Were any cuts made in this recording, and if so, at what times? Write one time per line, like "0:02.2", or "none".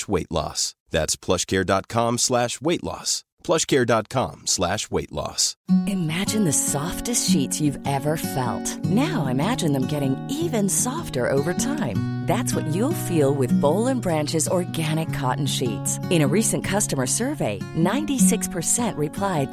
0:05.5